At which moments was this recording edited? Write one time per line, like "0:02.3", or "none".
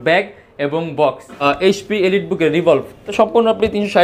0:01.4
0:03.0